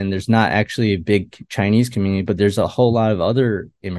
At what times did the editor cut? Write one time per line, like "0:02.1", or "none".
none